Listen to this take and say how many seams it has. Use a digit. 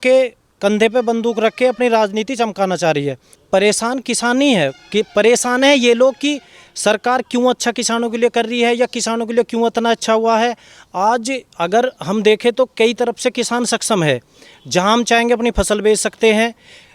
1